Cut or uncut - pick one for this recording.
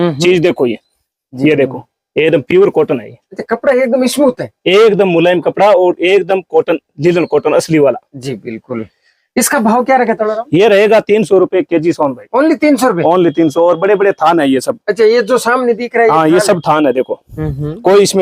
uncut